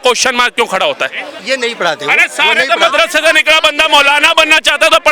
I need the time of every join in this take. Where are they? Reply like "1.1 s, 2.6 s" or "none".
1.3 s